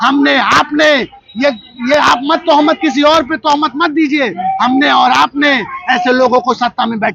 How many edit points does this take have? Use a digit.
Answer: 0